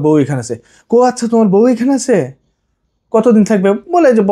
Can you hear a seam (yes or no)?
no